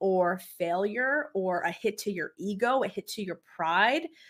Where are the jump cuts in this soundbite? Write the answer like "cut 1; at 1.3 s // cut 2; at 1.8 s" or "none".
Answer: none